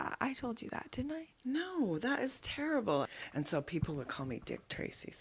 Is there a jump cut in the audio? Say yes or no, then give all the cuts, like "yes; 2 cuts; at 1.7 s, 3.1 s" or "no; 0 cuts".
yes; 1 cut; at 3.1 s